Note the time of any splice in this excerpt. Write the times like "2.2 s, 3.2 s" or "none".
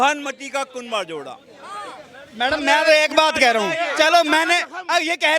none